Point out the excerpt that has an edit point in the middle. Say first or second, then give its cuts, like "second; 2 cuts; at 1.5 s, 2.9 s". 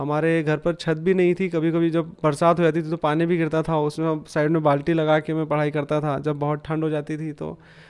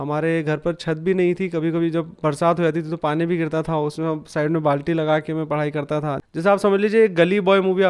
second; 1 cut; at 6.2 s